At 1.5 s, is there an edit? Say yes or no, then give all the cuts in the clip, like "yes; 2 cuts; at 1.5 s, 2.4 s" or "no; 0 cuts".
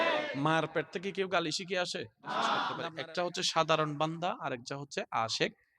no; 1 cut; at 2.8 s